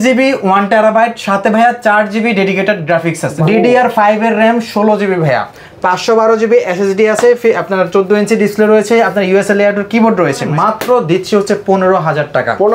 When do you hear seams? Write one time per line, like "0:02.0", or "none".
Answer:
0:03.3
0:10.5